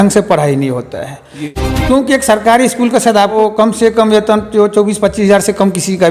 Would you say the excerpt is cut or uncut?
cut